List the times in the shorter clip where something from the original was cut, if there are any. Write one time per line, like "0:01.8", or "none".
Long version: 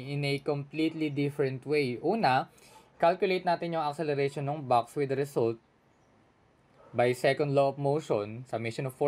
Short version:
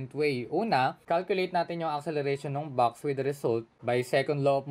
0:01.0
0:03.7